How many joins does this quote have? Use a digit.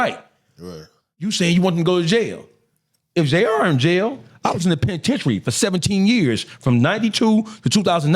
2